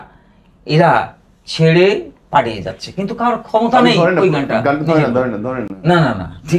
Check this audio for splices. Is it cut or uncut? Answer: uncut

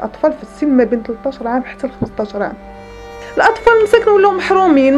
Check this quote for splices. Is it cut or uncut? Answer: cut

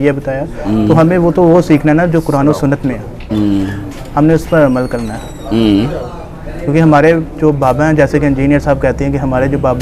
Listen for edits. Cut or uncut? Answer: uncut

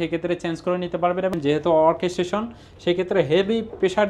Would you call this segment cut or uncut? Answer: cut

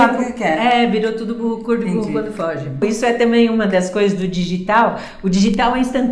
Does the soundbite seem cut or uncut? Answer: cut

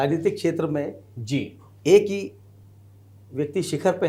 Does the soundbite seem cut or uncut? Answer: uncut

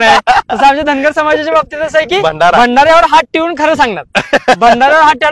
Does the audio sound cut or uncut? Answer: uncut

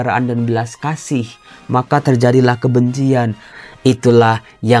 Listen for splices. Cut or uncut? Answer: cut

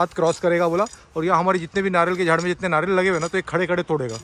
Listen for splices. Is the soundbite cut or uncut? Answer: uncut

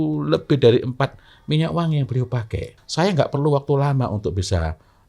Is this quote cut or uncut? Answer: cut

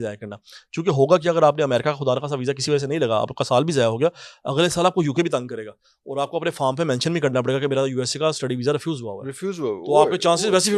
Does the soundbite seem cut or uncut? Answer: uncut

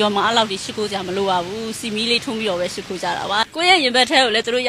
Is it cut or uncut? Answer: cut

